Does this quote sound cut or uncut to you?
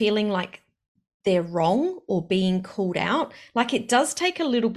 uncut